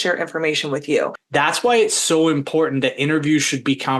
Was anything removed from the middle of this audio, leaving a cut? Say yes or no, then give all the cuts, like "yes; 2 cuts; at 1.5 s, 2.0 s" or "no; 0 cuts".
yes; 1 cut; at 1.2 s